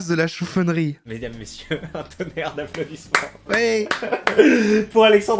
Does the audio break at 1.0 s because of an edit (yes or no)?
yes